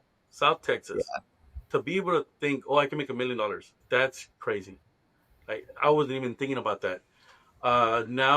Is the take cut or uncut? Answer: cut